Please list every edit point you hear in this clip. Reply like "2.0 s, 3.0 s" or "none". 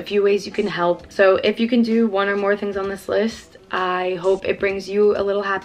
none

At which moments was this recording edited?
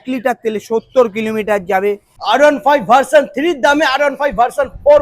2.1 s

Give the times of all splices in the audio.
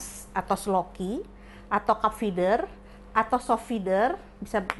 none

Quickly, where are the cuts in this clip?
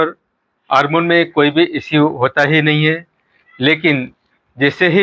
none

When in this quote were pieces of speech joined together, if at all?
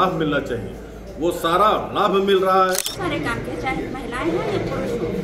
2.9 s

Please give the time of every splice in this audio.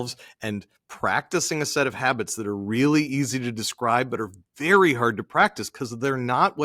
none

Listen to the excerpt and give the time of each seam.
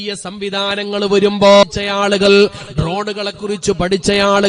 1.6 s

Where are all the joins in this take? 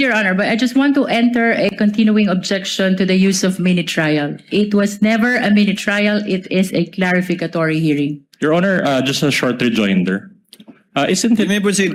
none

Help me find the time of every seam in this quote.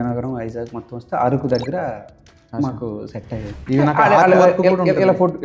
3.5 s

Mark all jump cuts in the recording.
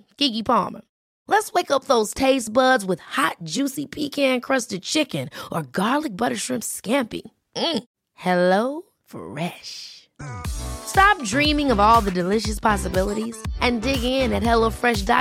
none

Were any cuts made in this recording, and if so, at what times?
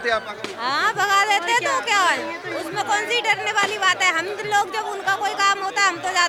none

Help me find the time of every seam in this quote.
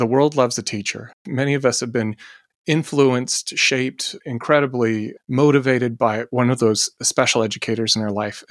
1.2 s

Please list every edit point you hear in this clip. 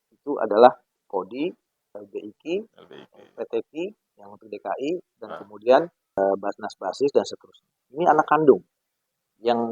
0.9 s, 6.2 s

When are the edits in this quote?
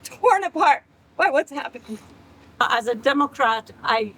2.6 s

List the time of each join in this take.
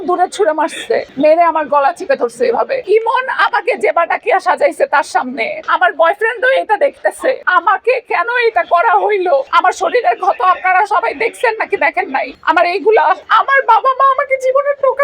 2.8 s, 5.6 s, 7.4 s, 9.5 s, 12.3 s

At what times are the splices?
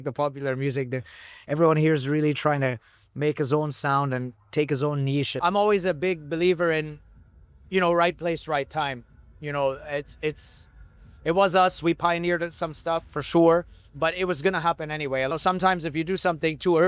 5.3 s, 15.3 s

